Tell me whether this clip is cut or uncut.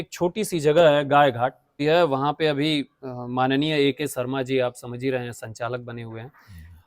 cut